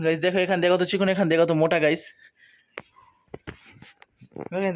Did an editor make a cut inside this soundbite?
no; 0 cuts

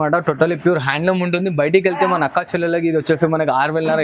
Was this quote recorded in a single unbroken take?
yes; 0 cuts

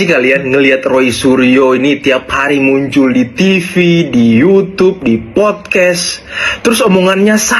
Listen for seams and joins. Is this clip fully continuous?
yes; 0 cuts

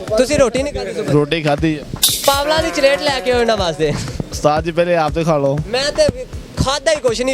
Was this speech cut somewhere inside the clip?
no; 0 cuts

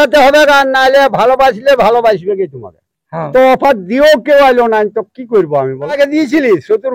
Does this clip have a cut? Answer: yes; 2 cuts; at 3.3 s, 6.0 s

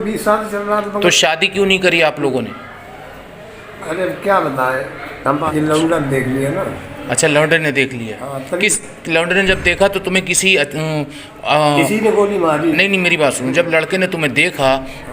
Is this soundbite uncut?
no; 1 cut; at 5.4 s

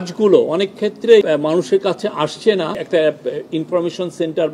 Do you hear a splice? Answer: yes; 2 cuts; at 1.2 s, 2.8 s

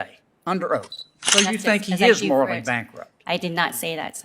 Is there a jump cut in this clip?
yes; 1 cut; at 1.3 s

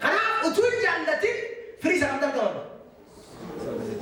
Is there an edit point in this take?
no; 0 cuts

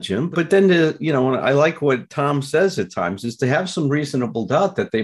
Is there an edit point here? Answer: no; 0 cuts

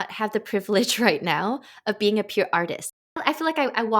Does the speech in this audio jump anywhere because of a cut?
yes; 1 cut; at 2.9 s

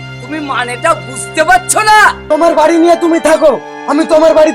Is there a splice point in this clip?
yes; 1 cut; at 2.2 s

